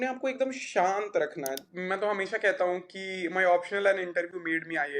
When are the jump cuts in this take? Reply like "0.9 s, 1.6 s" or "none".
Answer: 1.6 s